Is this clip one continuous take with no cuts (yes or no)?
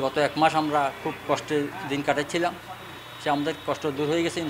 yes